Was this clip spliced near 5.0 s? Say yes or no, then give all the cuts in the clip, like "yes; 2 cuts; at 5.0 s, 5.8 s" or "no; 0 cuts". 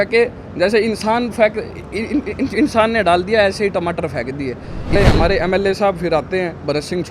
yes; 1 cut; at 5.0 s